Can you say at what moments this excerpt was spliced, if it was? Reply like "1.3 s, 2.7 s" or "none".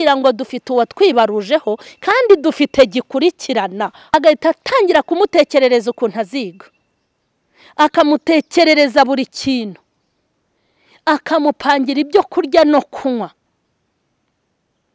4.1 s